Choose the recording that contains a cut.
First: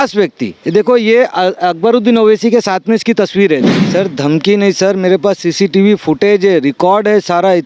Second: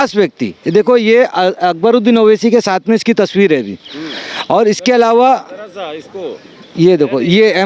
first; 1 cut; at 3.8 s

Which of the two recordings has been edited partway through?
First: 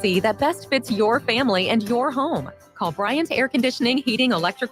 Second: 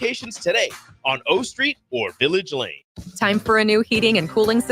second; 1 cut; at 2.8 s

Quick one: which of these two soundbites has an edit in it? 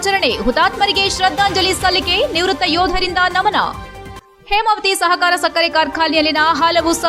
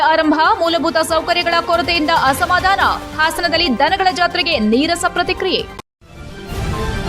second; 1 cut; at 5.7 s

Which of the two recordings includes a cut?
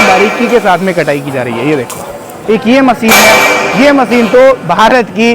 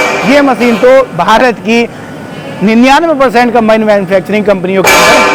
first; 1 cut; at 2.3 s

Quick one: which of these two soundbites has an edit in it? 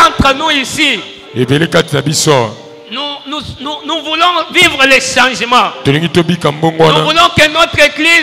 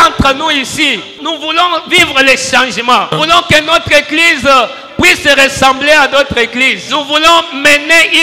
second; 3 cuts; at 1.2 s, 3.1 s, 6.8 s

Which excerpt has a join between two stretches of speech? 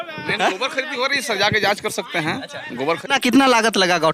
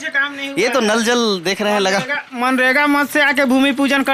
first; 1 cut; at 3.0 s

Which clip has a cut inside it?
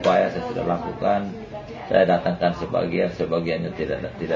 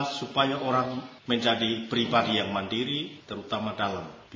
second; 2 cuts; at 1.1 s, 3.2 s

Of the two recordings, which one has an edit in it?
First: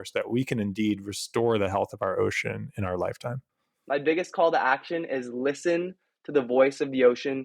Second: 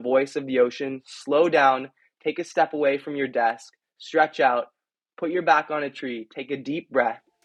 first; 1 cut; at 3.7 s

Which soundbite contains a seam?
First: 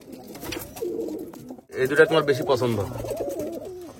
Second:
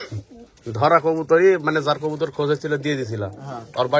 first; 1 cut; at 1.7 s

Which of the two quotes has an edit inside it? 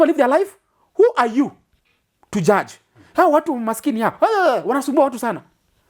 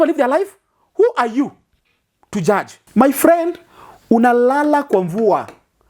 second; 1 cut; at 2.8 s

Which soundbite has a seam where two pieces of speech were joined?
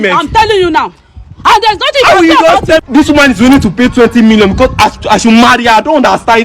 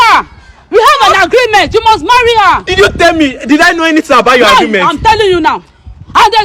first; 1 cut; at 2.8 s

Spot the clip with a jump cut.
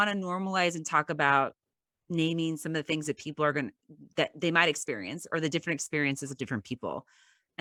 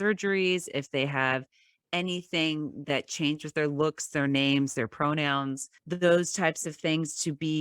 second; 1 cut; at 5.7 s

